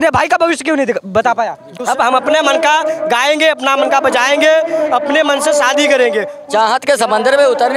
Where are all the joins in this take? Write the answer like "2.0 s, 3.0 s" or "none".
1.7 s, 6.3 s